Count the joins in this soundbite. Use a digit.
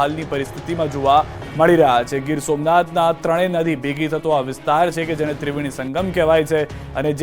1